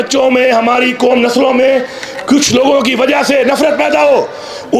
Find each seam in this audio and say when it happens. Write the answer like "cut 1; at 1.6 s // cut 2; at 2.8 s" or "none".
none